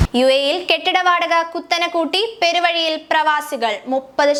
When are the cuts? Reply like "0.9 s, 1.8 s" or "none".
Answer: none